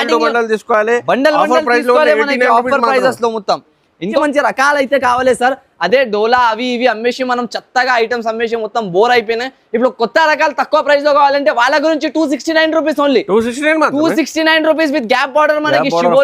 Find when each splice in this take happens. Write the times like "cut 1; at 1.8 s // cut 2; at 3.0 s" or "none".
cut 1; at 4.2 s